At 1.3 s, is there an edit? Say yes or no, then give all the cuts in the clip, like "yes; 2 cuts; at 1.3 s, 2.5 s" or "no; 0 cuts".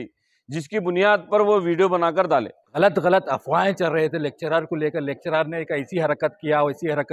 no; 1 cut; at 2.6 s